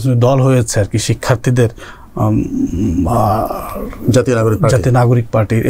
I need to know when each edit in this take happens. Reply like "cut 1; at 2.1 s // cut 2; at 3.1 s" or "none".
none